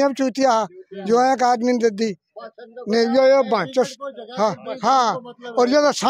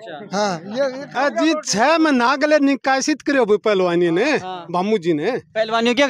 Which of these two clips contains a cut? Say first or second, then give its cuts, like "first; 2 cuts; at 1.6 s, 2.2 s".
second; 1 cut; at 1.1 s